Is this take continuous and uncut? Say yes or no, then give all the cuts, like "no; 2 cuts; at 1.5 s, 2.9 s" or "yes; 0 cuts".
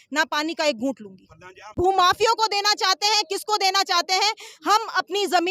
no; 1 cut; at 1.7 s